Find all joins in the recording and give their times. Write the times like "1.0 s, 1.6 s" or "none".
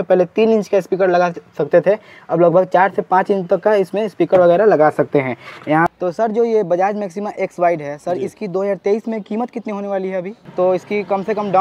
5.9 s, 10.4 s